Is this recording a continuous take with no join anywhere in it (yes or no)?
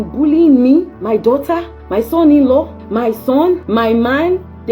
no